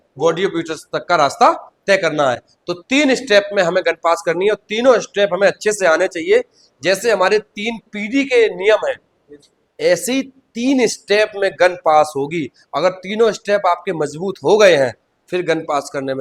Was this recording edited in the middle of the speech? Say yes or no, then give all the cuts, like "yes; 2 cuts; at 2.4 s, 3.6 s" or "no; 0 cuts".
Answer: no; 0 cuts